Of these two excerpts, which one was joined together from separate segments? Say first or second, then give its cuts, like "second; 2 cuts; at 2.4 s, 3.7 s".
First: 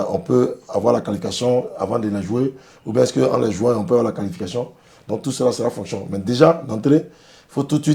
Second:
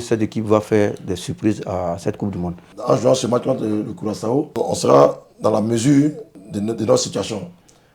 second; 3 cuts; at 2.7 s, 4.5 s, 6.3 s